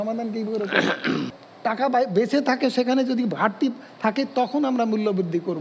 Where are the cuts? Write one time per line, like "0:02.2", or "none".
0:01.3